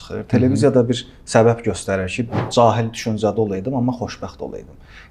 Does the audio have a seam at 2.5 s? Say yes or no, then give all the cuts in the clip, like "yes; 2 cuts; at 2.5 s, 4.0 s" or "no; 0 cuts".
yes; 1 cut; at 2.5 s